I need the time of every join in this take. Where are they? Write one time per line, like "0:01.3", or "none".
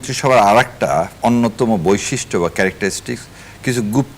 0:01.1

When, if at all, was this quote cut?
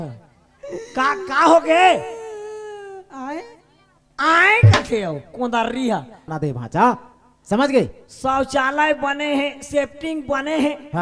0:06.3

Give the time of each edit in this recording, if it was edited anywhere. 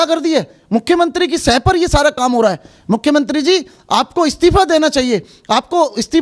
none

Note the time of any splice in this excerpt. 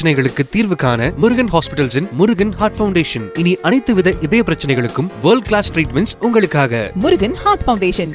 none

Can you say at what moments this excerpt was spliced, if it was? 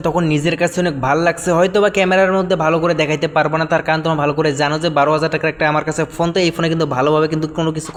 none

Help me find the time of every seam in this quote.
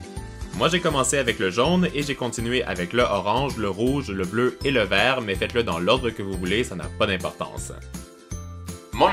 none

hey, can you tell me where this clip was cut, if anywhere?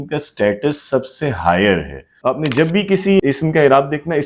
0:02.0

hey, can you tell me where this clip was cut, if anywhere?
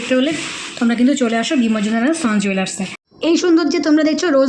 none

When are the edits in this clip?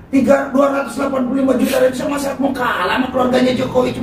none

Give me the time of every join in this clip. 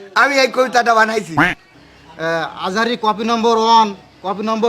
0:01.4

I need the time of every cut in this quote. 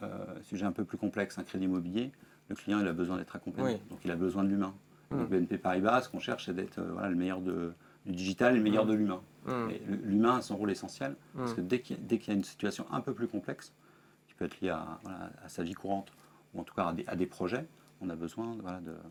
none

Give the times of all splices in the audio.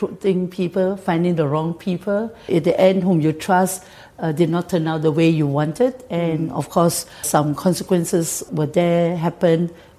0:02.4
0:07.3
0:08.4

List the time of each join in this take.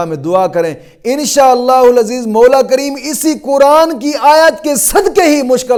none

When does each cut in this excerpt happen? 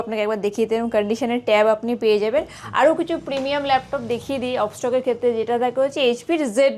none

